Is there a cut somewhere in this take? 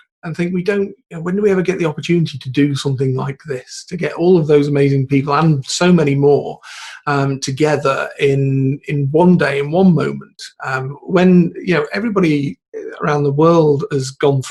no; 0 cuts

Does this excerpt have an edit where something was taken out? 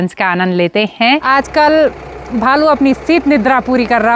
yes; 1 cut; at 1.2 s

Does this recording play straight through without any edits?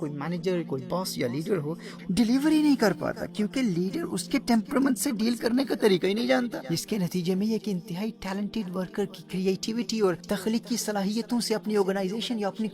no; 3 cuts; at 2.0 s, 6.7 s, 10.2 s

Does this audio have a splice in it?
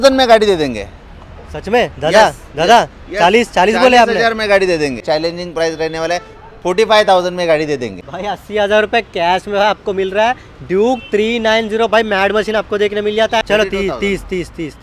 yes; 3 cuts; at 5.0 s, 8.0 s, 13.4 s

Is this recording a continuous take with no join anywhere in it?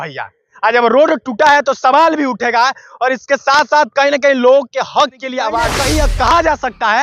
no; 1 cut; at 5.7 s

